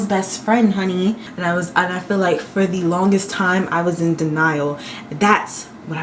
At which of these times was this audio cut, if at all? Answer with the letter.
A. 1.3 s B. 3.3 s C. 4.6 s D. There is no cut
A